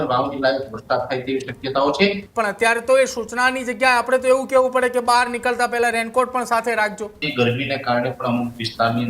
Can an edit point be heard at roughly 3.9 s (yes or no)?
no